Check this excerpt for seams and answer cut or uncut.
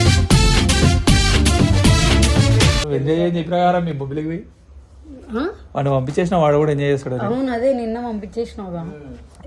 uncut